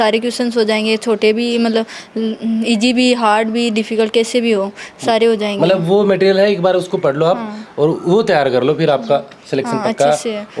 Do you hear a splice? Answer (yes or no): no